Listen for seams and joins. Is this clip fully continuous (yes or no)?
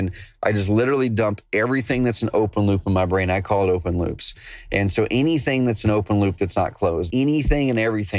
no